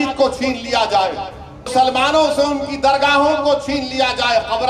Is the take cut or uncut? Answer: cut